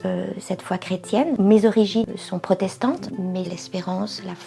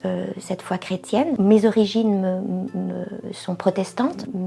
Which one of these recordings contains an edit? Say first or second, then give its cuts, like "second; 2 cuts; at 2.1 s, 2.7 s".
first; 2 cuts; at 2.0 s, 3.5 s